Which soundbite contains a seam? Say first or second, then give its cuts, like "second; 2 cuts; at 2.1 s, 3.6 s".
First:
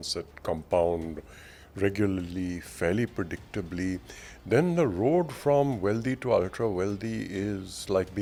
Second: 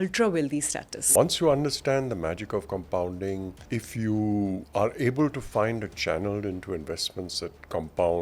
second; 3 cuts; at 1.0 s, 3.6 s, 4.6 s